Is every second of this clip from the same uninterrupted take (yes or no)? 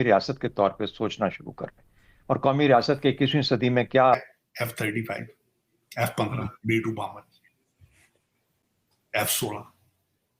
no